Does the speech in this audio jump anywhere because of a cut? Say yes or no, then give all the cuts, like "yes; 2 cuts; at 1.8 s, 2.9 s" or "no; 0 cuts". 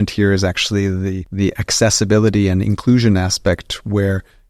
yes; 1 cut; at 1.2 s